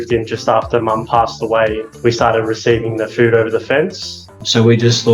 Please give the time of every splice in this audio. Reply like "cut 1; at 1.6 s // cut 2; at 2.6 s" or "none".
cut 1; at 1.9 s // cut 2; at 4.3 s